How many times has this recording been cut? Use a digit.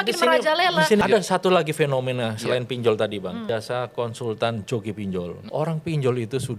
3